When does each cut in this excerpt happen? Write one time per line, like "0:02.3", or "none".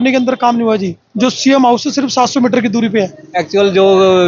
0:03.1